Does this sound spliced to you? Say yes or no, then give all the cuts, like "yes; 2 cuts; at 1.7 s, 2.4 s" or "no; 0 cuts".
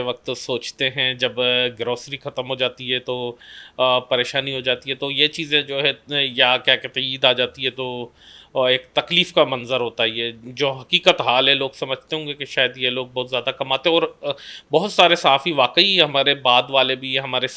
no; 0 cuts